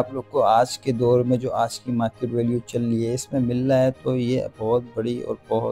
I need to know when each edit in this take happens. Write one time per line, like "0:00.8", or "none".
none